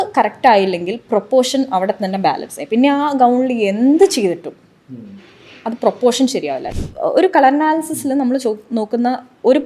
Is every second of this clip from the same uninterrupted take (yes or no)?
no